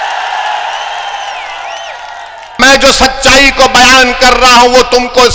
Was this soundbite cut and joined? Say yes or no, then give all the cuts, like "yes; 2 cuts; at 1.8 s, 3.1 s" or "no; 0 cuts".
yes; 1 cut; at 2.6 s